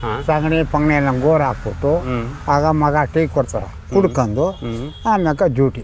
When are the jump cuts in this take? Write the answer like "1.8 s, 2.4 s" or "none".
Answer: none